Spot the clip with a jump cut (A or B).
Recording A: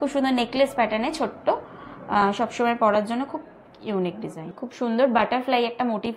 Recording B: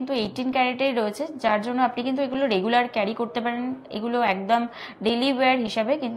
A